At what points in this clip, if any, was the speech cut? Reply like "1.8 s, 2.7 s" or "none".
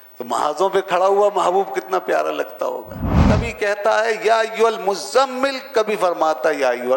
3.3 s